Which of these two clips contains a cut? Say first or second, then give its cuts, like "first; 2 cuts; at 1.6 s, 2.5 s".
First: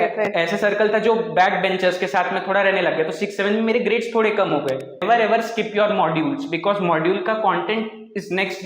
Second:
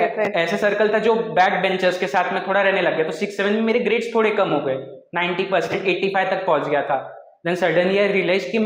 first; 1 cut; at 5.0 s